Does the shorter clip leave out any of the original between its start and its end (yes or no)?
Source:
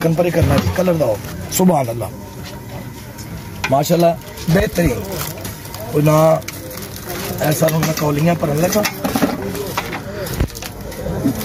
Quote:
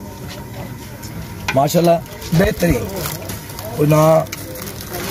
no